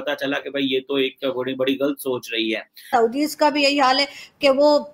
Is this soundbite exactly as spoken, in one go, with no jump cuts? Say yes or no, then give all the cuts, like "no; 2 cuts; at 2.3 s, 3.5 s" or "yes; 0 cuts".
no; 1 cut; at 2.9 s